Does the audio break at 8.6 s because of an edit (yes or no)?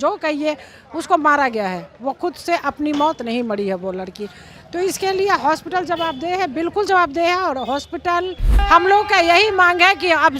yes